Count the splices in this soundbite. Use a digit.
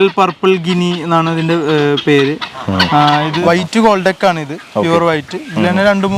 1